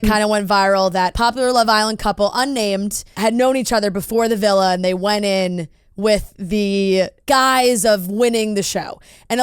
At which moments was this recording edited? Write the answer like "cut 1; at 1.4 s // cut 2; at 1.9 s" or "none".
cut 1; at 1.1 s // cut 2; at 3.1 s // cut 3; at 7.2 s

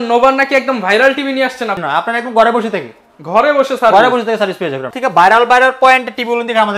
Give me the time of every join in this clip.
cut 1; at 1.8 s // cut 2; at 4.9 s

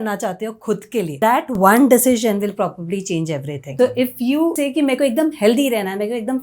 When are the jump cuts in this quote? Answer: cut 1; at 1.1 s // cut 2; at 3.6 s // cut 3; at 4.6 s

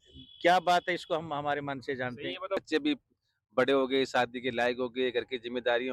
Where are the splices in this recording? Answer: cut 1; at 2.6 s

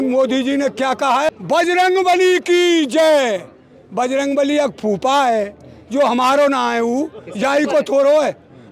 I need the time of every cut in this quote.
cut 1; at 1.3 s

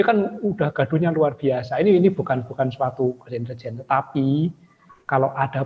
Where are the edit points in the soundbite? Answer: none

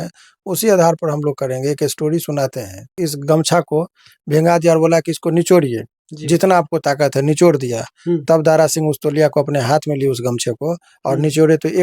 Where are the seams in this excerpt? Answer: cut 1; at 2.9 s

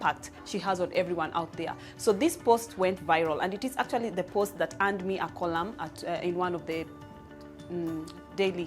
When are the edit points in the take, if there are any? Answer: none

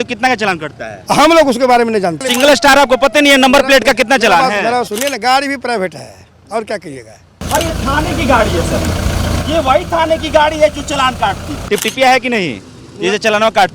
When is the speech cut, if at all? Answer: cut 1; at 2.2 s // cut 2; at 4.9 s // cut 3; at 7.3 s // cut 4; at 11.5 s

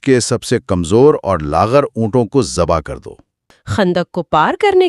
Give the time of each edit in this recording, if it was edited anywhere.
cut 1; at 3.5 s

